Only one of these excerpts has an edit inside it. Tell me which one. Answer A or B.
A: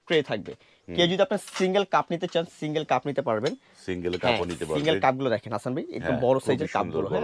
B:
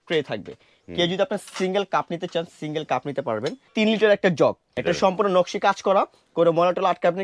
B